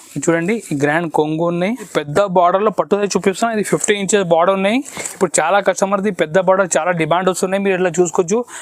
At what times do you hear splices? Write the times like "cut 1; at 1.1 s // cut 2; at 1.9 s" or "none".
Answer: cut 1; at 2.0 s

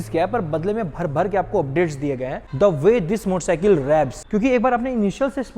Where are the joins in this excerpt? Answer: cut 1; at 2.5 s // cut 2; at 4.2 s

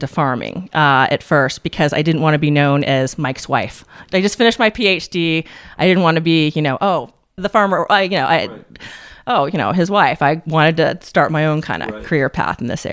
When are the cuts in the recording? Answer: cut 1; at 4.0 s // cut 2; at 7.4 s

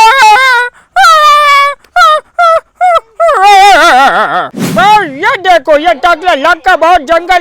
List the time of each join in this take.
cut 1; at 4.6 s

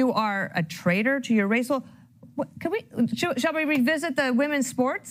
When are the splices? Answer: none

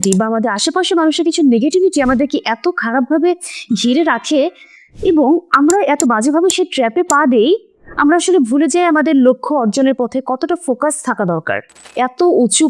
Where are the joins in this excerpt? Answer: cut 1; at 11.8 s

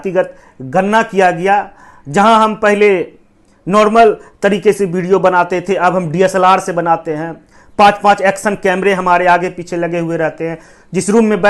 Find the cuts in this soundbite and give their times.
none

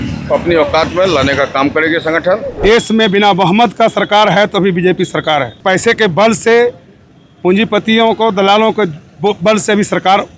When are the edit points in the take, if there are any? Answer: cut 1; at 2.6 s // cut 2; at 5.6 s

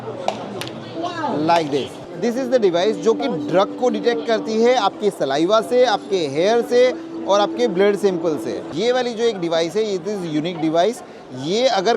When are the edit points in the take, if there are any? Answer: cut 1; at 2.0 s // cut 2; at 8.7 s

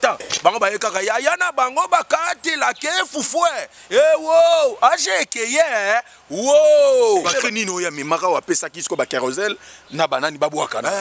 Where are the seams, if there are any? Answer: cut 1; at 7.3 s

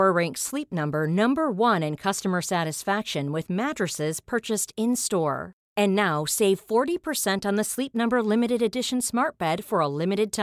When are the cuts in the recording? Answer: none

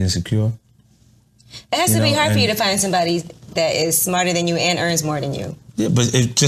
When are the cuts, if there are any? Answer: none

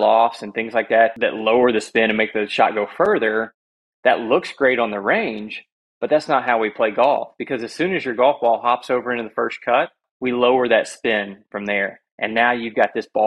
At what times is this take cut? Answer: cut 1; at 1.1 s // cut 2; at 10.0 s

